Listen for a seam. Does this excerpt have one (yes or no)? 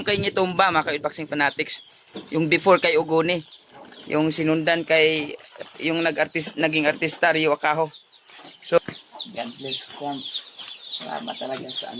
yes